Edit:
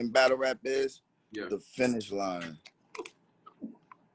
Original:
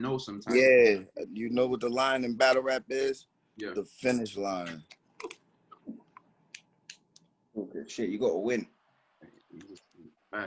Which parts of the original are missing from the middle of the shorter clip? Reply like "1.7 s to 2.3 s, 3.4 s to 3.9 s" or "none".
none